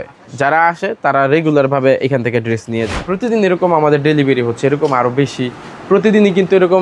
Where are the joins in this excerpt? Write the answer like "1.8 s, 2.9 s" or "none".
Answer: 3.1 s